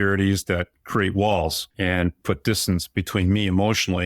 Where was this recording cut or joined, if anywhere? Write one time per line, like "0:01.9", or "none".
0:01.6